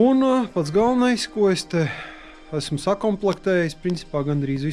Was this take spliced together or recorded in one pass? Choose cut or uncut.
uncut